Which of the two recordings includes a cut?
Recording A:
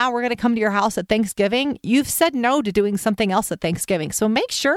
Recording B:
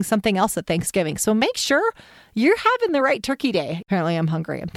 B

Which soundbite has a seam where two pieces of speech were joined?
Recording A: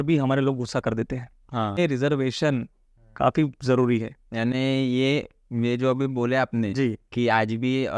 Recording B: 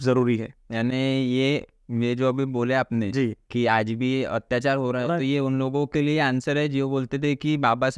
A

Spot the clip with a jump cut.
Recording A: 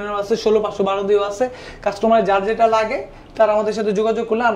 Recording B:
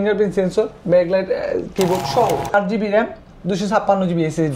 B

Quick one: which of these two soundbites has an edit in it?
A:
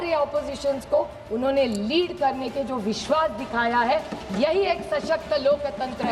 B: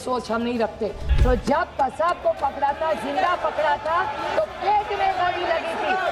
B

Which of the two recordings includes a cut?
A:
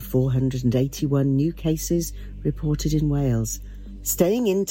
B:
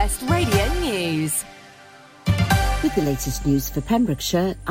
B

